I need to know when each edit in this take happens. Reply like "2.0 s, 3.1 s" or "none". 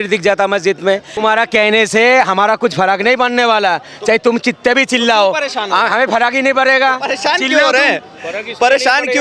1.1 s